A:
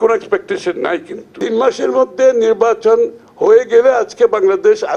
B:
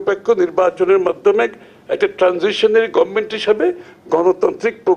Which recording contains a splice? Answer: A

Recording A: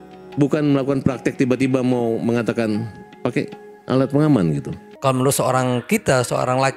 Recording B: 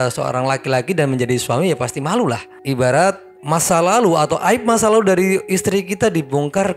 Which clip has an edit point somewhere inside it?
A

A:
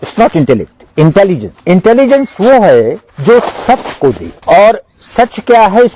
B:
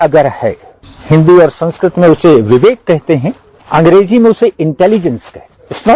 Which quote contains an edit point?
A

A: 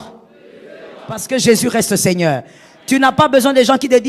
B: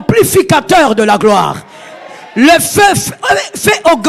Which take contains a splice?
A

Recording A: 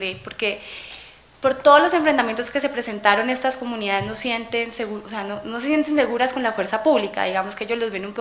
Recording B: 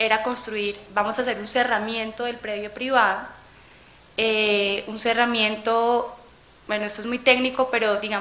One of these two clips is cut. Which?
A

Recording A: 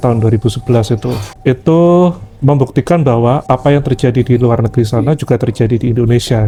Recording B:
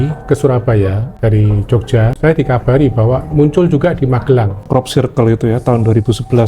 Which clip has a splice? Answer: B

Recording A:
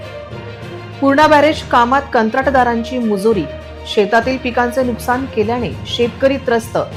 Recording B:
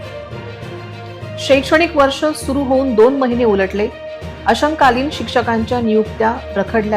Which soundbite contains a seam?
B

